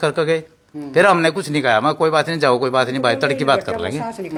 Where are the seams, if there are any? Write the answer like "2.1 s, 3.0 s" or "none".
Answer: none